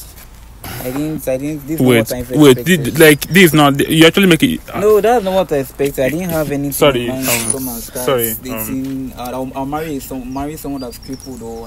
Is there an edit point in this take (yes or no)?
no